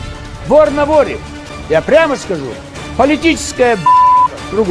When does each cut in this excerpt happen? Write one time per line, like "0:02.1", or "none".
none